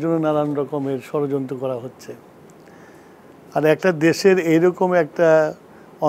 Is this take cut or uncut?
uncut